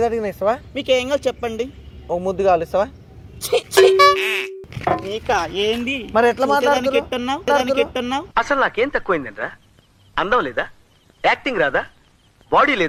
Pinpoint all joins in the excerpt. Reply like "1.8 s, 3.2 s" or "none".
none